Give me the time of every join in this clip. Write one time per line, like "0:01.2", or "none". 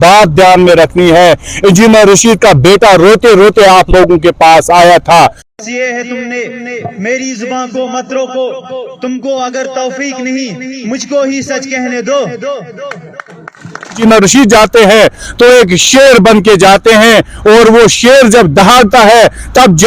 0:05.4
0:14.0